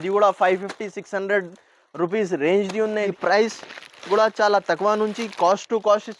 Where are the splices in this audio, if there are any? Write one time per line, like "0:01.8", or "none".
0:03.1